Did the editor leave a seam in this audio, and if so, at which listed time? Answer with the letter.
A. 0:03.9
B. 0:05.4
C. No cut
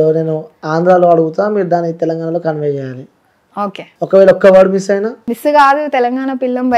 A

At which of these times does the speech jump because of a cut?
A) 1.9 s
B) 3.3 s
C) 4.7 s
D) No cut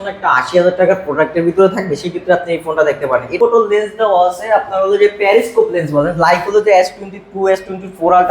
B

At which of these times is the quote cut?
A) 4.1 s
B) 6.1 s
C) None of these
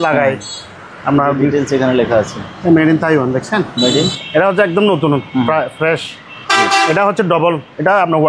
A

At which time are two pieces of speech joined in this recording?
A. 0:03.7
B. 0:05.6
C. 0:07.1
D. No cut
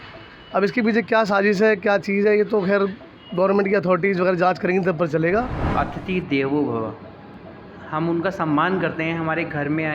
B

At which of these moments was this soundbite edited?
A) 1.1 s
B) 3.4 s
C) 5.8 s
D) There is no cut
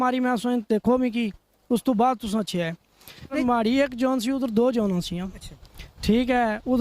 B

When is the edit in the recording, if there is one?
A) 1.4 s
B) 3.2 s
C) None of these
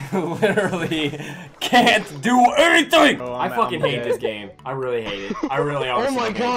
B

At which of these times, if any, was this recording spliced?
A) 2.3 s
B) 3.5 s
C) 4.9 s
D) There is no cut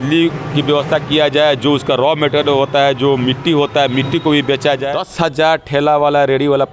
C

